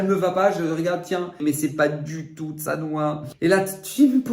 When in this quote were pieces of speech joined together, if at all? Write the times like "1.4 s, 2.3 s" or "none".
1.4 s, 3.3 s